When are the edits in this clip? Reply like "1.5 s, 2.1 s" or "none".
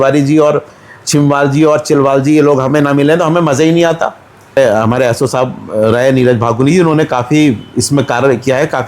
4.6 s